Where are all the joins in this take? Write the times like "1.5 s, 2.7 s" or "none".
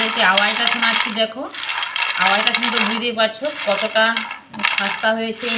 none